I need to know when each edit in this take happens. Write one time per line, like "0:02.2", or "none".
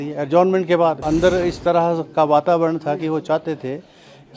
0:01.0